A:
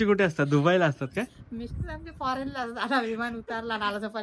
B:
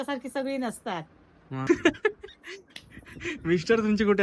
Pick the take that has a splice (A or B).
B